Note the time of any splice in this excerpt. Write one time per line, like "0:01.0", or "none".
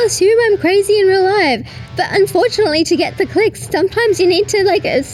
none

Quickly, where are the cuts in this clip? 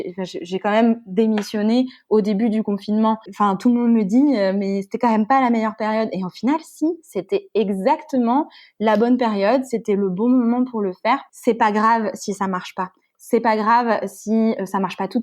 0:03.3
0:11.3

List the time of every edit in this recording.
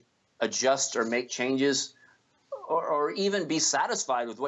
none

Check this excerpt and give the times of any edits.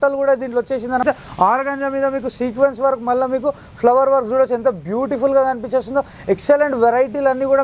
0:01.0

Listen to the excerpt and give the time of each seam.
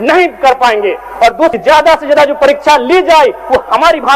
0:01.5

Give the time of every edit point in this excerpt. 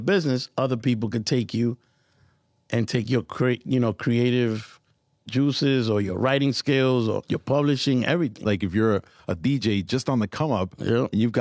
0:07.2
0:08.4

